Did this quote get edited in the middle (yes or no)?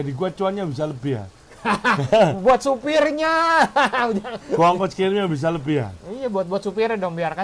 no